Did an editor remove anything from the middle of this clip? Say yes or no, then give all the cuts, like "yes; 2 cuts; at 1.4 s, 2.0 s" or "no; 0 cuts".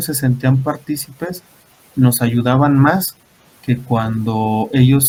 no; 0 cuts